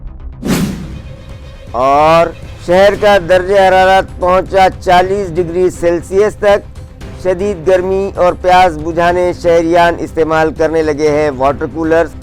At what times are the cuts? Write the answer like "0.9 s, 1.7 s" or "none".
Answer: 1.0 s